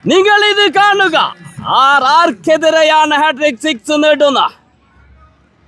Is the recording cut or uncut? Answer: uncut